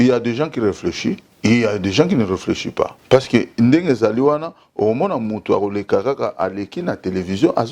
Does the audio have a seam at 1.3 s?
yes; 2 cuts; at 1.3 s, 3.0 s

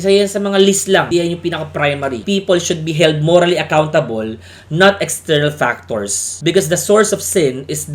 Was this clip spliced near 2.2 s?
yes; 1 cut; at 2.2 s

